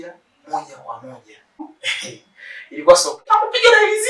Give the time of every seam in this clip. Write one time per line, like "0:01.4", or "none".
0:01.6
0:03.3